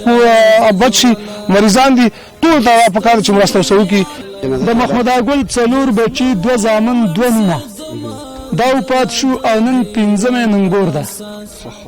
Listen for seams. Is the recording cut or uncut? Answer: cut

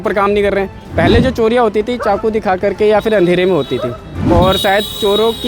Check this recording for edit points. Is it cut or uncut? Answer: cut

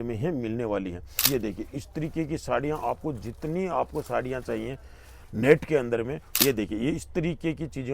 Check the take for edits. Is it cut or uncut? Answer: cut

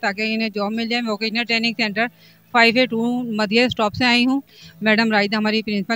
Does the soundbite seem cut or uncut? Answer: uncut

